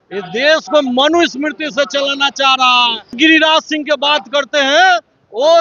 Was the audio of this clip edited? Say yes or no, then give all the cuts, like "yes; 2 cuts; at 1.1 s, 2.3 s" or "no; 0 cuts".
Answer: yes; 1 cut; at 3.1 s